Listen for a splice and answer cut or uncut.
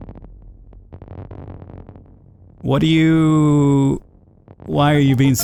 uncut